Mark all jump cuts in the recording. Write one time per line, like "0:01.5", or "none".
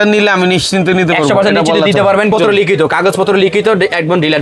0:02.3